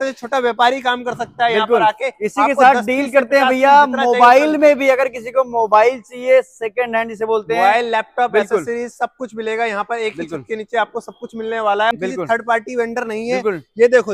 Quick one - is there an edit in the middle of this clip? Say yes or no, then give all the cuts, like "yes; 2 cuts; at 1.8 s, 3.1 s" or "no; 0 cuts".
yes; 1 cut; at 11.9 s